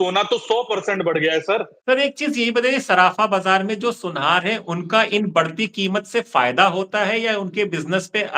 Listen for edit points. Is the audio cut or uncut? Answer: cut